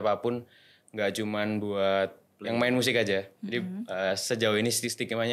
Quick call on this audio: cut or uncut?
uncut